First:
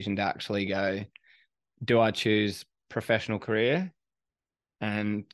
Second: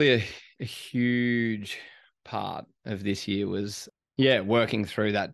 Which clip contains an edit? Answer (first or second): second